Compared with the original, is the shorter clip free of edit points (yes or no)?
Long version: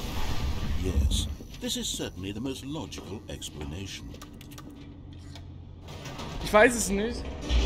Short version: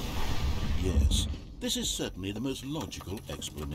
yes